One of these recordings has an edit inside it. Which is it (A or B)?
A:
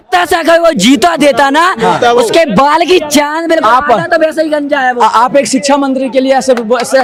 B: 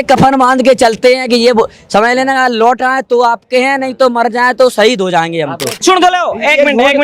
B